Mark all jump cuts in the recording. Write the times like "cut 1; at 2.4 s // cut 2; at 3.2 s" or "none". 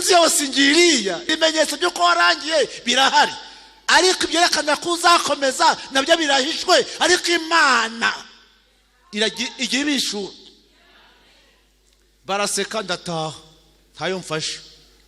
cut 1; at 1.2 s